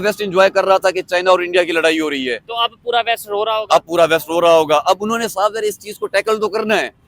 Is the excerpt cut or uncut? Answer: uncut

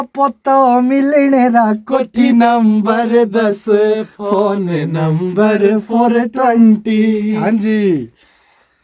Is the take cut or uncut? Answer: uncut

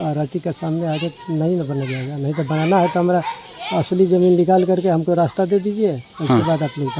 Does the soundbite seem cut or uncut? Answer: uncut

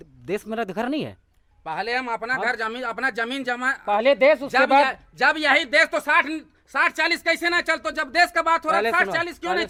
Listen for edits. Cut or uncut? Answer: uncut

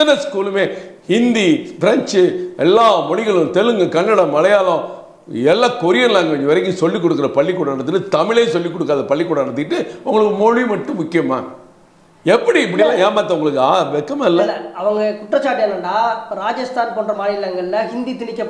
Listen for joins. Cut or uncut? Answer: uncut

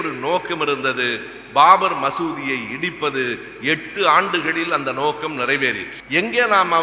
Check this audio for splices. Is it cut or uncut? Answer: cut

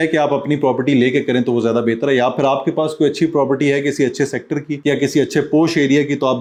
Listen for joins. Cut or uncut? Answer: uncut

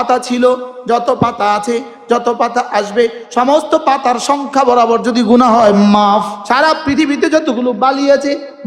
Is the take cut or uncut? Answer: cut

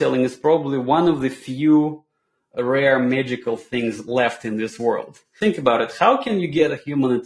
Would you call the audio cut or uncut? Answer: cut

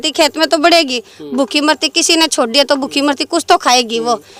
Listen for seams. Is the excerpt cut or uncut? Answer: uncut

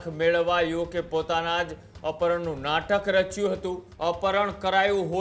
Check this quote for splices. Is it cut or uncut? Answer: cut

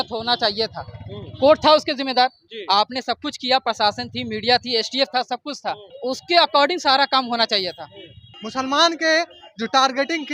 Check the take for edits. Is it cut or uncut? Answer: cut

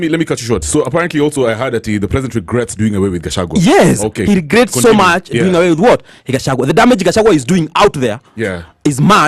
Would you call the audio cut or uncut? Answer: uncut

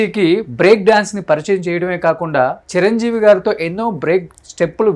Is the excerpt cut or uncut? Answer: uncut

